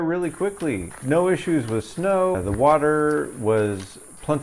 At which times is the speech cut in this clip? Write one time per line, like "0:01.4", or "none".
0:00.9
0:02.4